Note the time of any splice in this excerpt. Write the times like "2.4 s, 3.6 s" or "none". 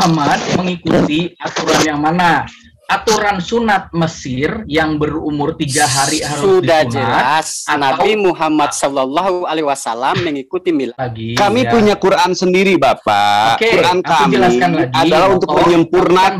10.9 s